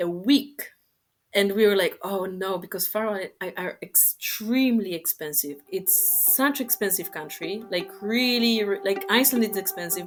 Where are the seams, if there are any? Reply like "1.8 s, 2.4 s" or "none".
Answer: none